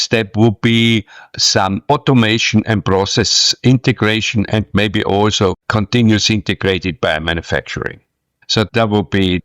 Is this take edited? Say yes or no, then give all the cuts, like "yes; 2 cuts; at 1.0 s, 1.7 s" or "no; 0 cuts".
yes; 1 cut; at 1.6 s